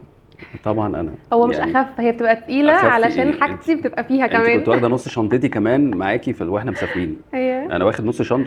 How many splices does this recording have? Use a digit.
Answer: 0